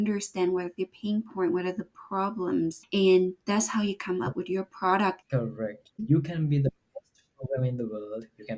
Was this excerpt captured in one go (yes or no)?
no